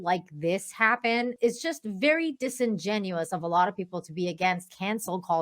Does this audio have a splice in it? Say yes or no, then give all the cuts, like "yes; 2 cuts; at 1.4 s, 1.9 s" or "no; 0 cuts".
yes; 1 cut; at 1.3 s